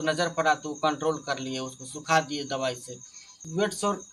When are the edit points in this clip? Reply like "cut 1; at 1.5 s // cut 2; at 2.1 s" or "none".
none